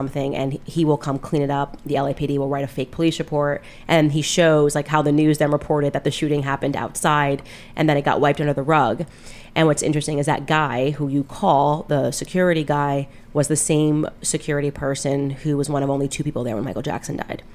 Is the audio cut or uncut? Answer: uncut